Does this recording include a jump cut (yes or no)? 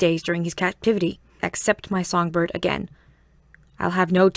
no